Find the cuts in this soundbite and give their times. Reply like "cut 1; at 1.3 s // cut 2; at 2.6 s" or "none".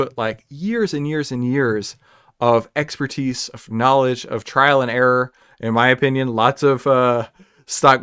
none